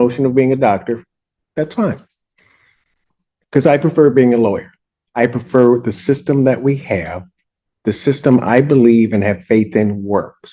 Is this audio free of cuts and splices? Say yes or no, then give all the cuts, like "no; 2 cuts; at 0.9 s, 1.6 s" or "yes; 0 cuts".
yes; 0 cuts